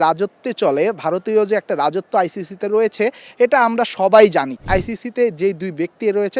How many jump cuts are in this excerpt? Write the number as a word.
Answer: one